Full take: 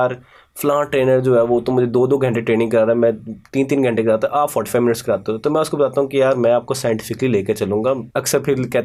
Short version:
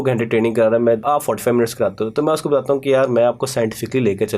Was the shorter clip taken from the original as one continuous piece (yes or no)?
no